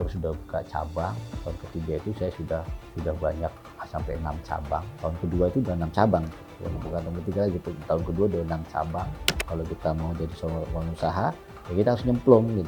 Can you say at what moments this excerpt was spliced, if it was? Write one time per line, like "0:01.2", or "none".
0:01.3
0:09.5